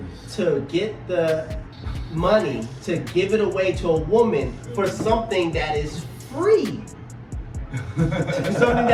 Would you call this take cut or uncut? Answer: uncut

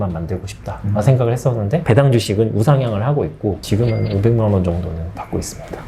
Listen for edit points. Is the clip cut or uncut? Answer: cut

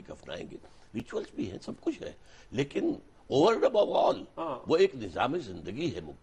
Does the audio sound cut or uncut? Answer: uncut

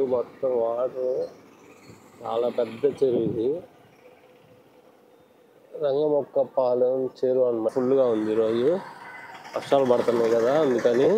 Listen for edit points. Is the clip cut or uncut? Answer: cut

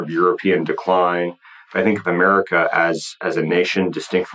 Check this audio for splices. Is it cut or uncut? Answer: uncut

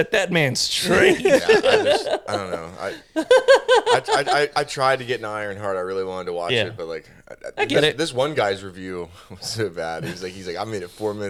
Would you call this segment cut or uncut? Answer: uncut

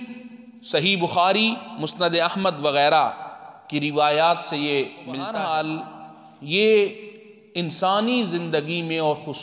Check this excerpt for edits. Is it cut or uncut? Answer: cut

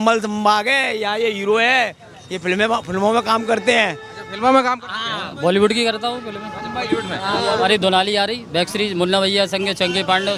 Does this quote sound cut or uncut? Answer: uncut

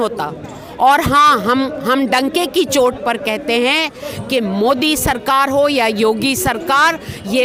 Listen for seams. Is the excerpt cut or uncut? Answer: uncut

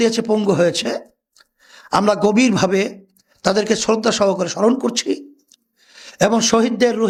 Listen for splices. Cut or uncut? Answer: uncut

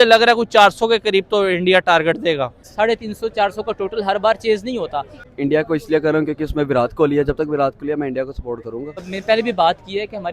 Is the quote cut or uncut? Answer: cut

